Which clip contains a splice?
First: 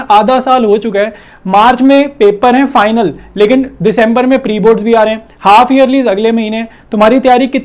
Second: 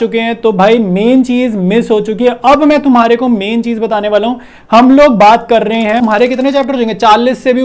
second; 1 cut; at 6.0 s

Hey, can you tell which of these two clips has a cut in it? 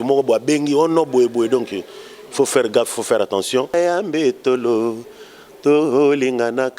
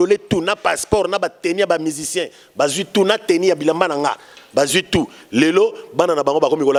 first; 1 cut; at 3.7 s

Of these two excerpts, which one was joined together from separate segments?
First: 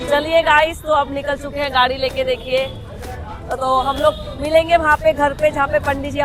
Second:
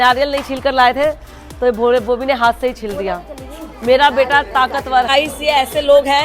second; 1 cut; at 5.1 s

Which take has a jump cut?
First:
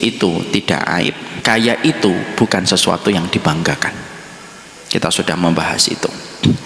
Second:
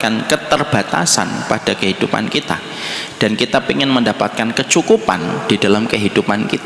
first; 1 cut; at 1.3 s

